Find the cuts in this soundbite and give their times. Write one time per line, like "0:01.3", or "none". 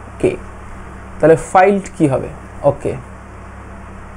none